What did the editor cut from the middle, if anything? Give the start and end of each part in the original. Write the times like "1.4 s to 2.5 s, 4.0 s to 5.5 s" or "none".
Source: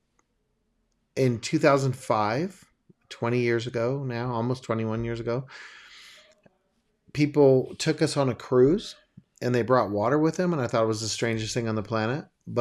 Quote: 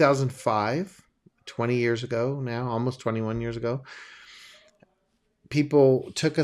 none